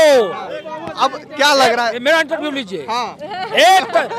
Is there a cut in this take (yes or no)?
no